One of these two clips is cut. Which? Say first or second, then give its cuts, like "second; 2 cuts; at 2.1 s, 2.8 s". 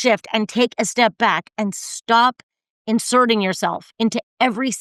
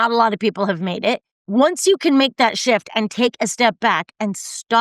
second; 1 cut; at 1.3 s